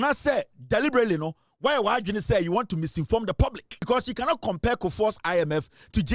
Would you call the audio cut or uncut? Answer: cut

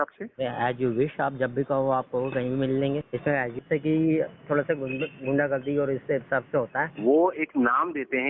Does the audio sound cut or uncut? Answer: cut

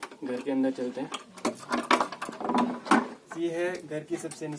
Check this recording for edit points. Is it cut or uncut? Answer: cut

